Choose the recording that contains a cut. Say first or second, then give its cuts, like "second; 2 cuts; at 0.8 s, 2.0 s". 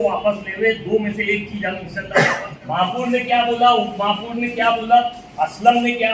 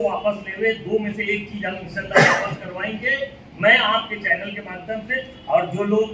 first; 1 cut; at 2.5 s